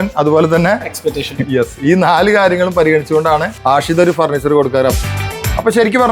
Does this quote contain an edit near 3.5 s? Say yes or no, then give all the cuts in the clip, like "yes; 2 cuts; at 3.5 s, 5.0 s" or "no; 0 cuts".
yes; 2 cuts; at 3.5 s, 5.1 s